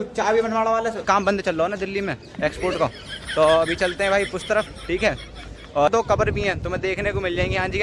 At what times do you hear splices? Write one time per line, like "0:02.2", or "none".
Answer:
0:01.0
0:05.9